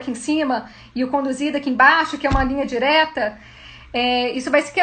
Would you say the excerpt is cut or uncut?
uncut